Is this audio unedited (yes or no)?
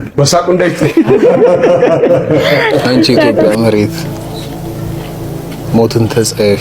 no